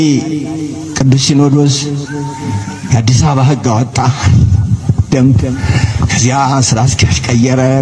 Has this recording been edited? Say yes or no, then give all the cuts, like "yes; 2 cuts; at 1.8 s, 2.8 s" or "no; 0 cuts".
no; 0 cuts